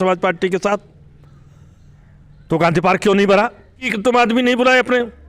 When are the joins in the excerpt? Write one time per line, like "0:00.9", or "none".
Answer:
0:03.9